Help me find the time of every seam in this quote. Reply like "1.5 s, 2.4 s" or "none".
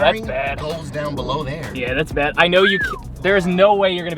none